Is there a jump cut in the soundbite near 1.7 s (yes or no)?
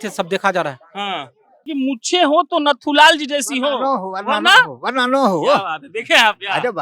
yes